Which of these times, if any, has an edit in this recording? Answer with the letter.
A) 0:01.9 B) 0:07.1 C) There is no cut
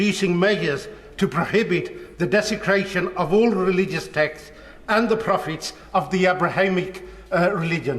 C